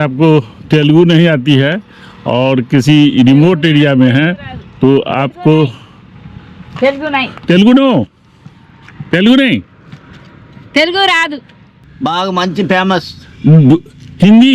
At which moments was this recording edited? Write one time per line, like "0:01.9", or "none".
0:11.8